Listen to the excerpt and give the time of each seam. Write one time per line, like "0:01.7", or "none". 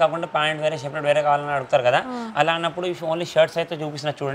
none